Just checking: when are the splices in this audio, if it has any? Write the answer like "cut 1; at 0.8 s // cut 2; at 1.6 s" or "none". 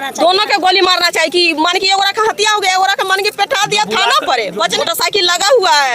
cut 1; at 4.8 s

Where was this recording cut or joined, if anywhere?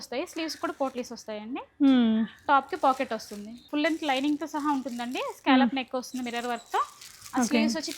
cut 1; at 3.6 s

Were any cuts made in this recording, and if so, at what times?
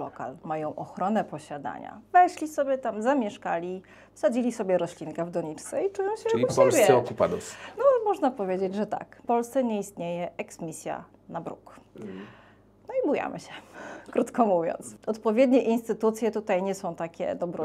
cut 1; at 9.2 s // cut 2; at 14.9 s

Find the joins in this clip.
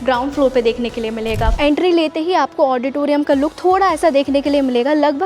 cut 1; at 1.5 s

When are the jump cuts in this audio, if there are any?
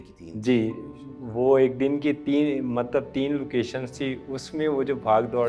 none

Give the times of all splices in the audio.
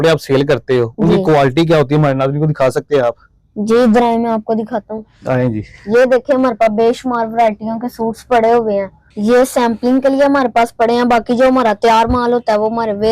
none

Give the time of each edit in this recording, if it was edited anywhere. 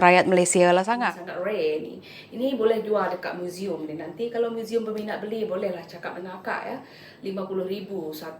cut 1; at 1.0 s

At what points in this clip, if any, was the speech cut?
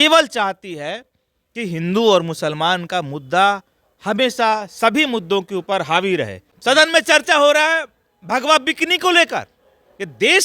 cut 1; at 6.4 s

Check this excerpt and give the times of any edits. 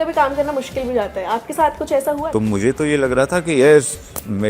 cut 1; at 2.2 s

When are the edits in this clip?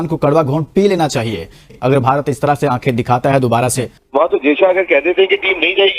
cut 1; at 1.7 s // cut 2; at 3.9 s

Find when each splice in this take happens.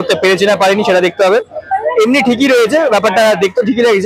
none

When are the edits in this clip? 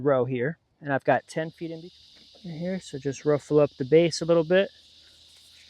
cut 1; at 1.6 s

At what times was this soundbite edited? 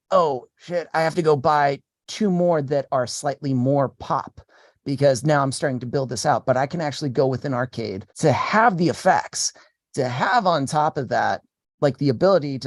cut 1; at 8.0 s

